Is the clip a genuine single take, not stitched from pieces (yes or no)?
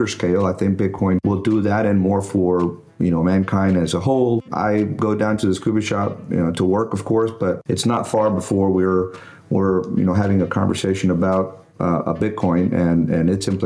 no